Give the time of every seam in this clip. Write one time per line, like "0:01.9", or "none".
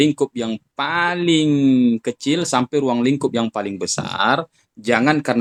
none